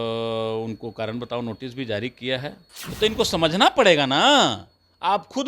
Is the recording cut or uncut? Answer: cut